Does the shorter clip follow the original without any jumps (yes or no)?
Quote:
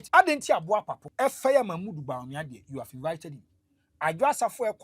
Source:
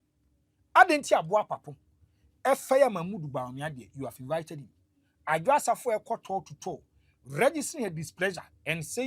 no